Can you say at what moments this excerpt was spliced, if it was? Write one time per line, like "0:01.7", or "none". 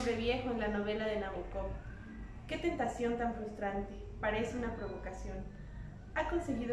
none